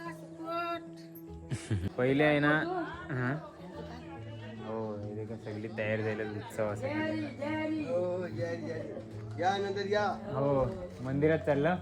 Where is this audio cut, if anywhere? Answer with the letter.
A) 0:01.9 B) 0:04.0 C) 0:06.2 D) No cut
A